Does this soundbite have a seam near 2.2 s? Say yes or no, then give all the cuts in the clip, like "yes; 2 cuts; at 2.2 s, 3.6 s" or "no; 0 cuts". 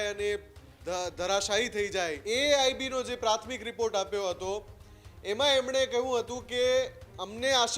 yes; 1 cut; at 2.2 s